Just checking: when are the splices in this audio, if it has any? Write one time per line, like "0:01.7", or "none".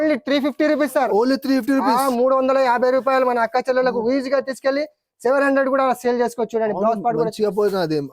none